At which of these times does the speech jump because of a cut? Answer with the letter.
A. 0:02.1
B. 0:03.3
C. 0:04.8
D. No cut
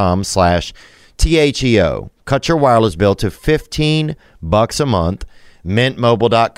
A